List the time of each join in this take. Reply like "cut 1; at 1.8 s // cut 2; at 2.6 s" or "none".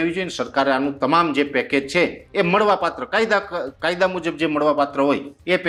none